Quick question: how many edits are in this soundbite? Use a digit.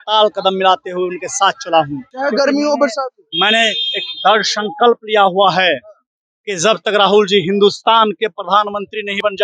1